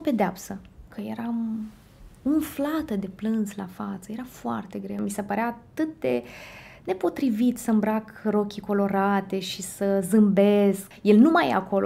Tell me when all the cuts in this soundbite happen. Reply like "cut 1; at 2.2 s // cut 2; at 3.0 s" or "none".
cut 1; at 0.9 s // cut 2; at 5.0 s // cut 3; at 10.9 s